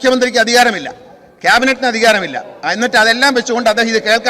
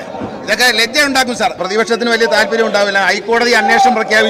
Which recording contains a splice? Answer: second; 1 cut; at 1.6 s

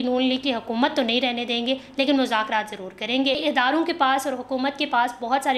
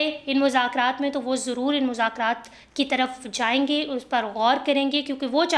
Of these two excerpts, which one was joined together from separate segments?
first; 1 cut; at 3.4 s

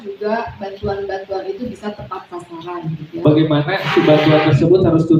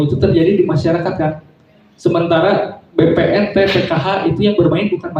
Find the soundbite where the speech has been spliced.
first; 1 cut; at 3.0 s

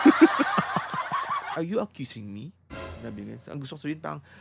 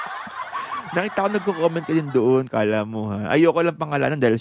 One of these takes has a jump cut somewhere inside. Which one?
first; 1 cut; at 1.0 s

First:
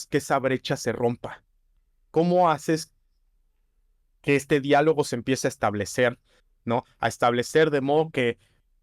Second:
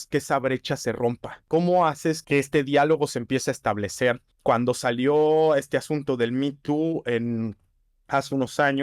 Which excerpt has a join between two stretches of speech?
second; 3 cuts; at 1.3 s, 2.2 s, 4.3 s

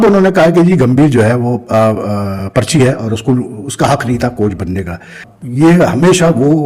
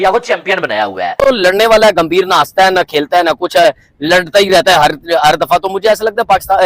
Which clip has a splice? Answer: second; 1 cut; at 1.2 s

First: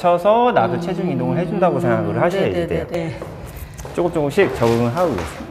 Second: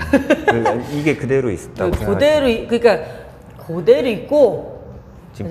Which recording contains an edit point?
first; 1 cut; at 3.0 s

